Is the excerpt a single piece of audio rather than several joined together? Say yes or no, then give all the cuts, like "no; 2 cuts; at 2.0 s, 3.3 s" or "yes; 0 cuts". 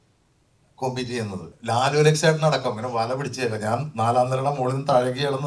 no; 1 cut; at 1.5 s